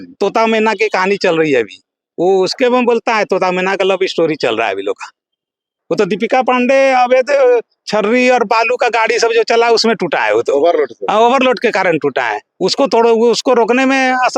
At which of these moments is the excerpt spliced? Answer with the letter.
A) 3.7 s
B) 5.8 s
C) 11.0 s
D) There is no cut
B